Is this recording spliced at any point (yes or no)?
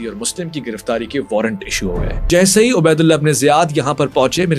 yes